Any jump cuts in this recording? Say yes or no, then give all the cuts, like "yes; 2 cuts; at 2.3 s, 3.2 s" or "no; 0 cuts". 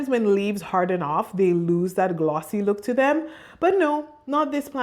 no; 0 cuts